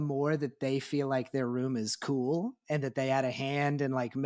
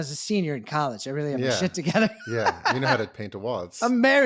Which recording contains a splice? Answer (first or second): second